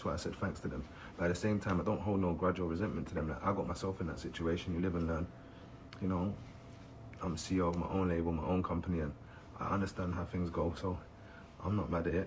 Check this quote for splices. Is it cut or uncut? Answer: cut